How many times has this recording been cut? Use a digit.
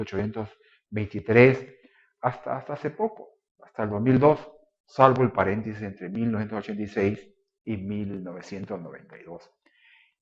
0